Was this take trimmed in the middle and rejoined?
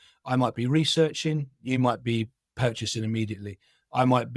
no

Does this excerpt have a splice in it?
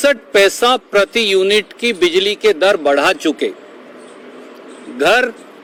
no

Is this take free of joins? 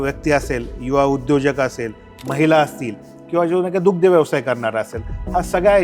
yes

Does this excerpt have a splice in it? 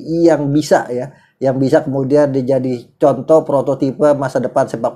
no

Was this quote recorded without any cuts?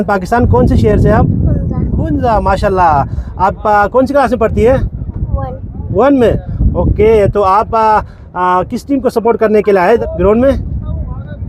no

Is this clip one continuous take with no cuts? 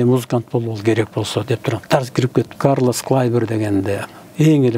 no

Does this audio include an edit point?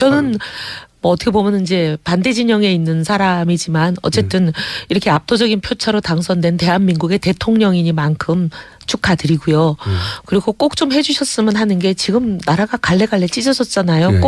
no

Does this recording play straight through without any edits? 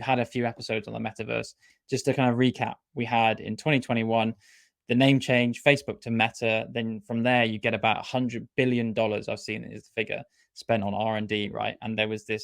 no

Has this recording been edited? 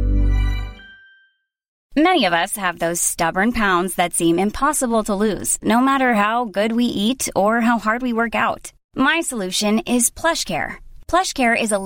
yes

